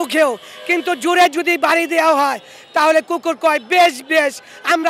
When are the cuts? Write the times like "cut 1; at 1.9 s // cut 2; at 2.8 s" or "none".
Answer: none